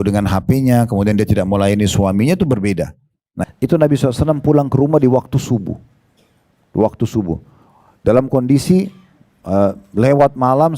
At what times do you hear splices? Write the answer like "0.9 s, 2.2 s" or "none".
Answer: 3.3 s